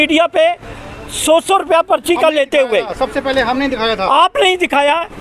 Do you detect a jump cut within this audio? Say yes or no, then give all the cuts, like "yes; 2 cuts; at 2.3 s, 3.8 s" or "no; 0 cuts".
no; 0 cuts